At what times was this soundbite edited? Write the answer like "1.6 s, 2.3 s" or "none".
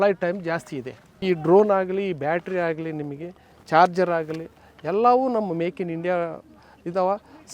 1.2 s